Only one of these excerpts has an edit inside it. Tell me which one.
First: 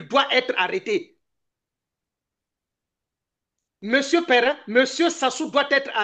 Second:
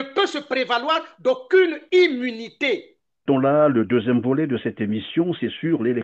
second; 1 cut; at 3.2 s

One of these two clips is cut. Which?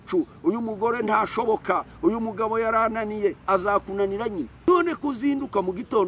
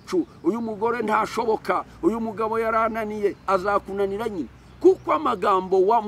first; 1 cut; at 4.5 s

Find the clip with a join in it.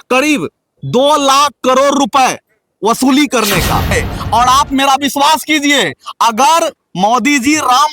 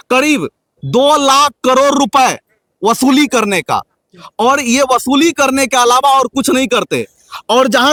first; 1 cut; at 4.1 s

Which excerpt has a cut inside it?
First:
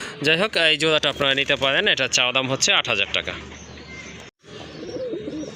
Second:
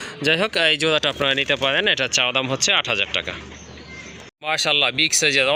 first; 1 cut; at 4.3 s

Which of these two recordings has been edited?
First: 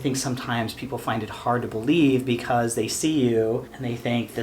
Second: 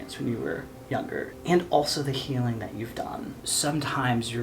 second; 2 cuts; at 1.0 s, 3.4 s

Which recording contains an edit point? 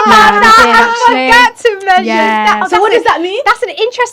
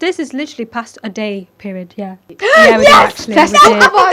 second; 1 cut; at 2.3 s

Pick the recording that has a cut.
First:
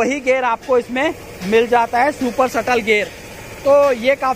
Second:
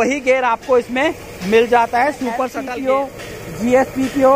second; 1 cut; at 2.5 s

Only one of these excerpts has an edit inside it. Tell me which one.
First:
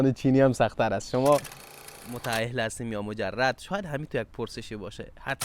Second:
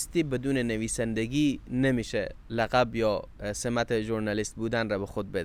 first; 1 cut; at 1.6 s

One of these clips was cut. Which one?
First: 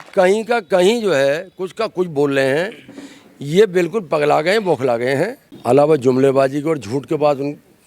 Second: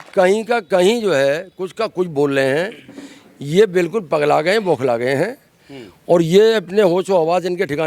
first; 1 cut; at 5.5 s

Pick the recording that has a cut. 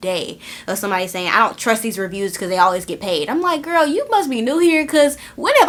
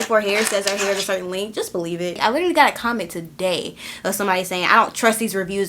second; 1 cut; at 2.2 s

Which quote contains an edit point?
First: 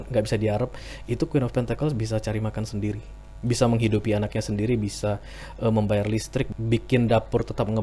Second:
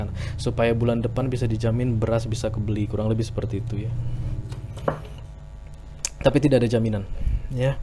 first; 1 cut; at 6.5 s

